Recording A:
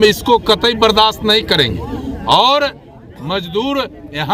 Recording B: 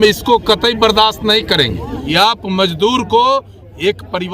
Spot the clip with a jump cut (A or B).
B